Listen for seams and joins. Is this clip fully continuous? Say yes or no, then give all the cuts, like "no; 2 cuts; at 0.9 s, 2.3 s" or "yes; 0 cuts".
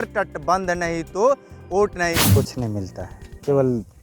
no; 1 cut; at 2.2 s